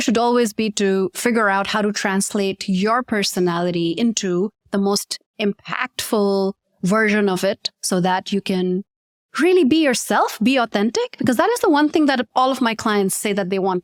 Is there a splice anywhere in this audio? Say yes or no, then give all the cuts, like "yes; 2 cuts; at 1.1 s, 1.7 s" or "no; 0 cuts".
no; 0 cuts